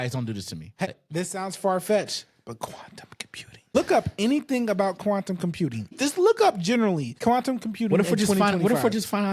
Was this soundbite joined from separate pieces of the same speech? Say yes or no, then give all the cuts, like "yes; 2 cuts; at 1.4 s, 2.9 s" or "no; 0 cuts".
yes; 4 cuts; at 0.9 s, 3.8 s, 6.0 s, 7.1 s